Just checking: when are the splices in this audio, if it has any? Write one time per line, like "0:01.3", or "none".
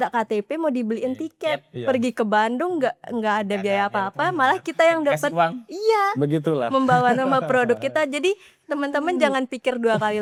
none